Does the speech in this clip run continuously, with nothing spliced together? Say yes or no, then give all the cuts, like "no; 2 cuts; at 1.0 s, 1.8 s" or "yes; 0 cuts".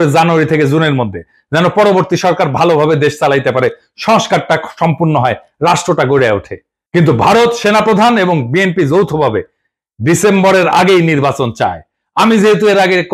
yes; 0 cuts